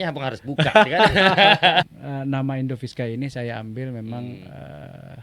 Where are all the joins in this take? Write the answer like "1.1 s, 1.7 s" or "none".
1.9 s